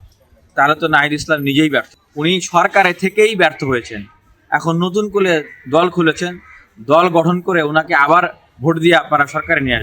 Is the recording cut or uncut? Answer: cut